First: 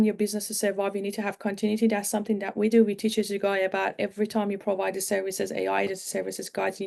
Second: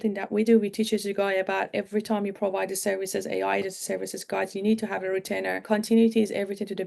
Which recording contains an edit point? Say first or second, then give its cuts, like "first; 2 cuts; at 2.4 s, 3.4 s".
second; 1 cut; at 5.6 s